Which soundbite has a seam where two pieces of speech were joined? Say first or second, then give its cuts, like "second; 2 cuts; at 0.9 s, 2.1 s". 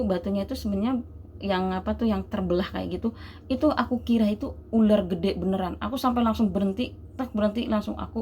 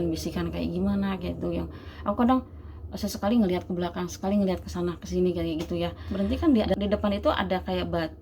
second; 1 cut; at 6.0 s